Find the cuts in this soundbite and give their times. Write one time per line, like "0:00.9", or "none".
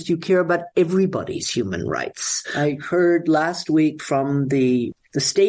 0:02.4